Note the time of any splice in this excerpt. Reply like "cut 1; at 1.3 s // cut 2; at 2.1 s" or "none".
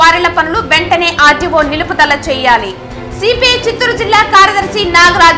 none